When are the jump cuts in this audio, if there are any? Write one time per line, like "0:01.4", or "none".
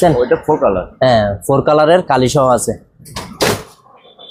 none